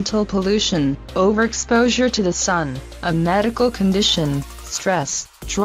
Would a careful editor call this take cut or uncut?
cut